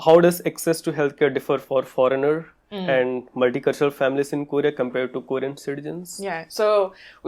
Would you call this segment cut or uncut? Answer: uncut